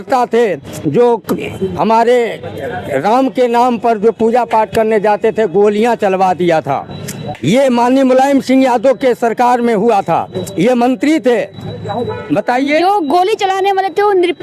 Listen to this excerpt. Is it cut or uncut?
uncut